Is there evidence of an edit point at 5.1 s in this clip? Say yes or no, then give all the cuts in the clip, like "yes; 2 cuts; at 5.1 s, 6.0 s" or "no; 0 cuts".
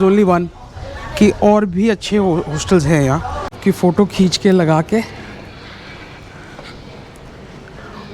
no; 1 cut; at 3.5 s